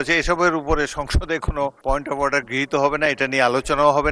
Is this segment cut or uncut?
cut